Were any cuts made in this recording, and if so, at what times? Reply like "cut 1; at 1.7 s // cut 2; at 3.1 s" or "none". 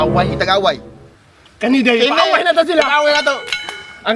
none